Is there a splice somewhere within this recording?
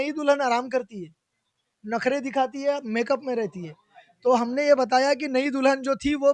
no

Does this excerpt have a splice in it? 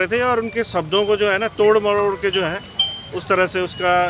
no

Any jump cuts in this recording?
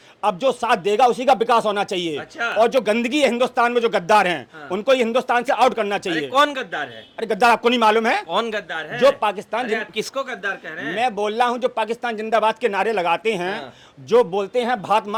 no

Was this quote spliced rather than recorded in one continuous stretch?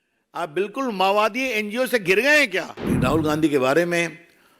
yes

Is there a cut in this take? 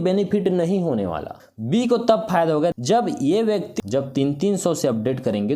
yes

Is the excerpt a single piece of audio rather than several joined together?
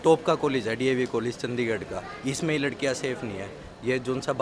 yes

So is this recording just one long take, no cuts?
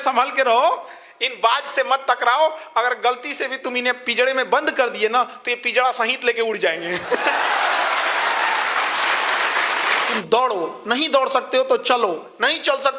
no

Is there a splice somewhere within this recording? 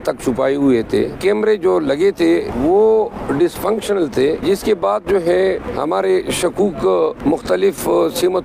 yes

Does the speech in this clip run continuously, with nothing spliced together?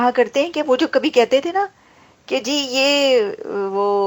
yes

